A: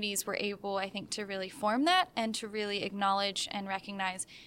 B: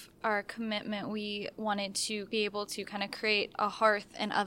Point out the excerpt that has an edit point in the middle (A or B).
B